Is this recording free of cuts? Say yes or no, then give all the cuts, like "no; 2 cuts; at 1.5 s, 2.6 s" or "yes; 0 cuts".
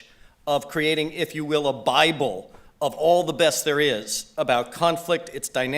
no; 1 cut; at 2.5 s